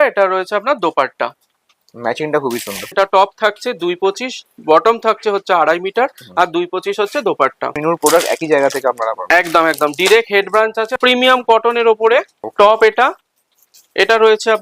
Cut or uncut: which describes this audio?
cut